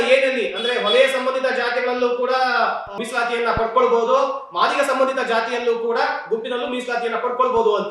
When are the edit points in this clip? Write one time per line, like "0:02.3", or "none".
0:02.9